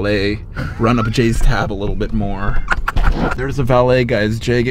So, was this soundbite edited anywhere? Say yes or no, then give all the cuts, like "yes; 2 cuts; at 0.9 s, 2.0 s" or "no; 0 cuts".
yes; 1 cut; at 3.4 s